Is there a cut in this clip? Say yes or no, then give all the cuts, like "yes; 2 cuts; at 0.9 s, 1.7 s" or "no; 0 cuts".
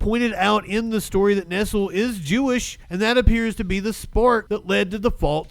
yes; 2 cuts; at 2.8 s, 4.4 s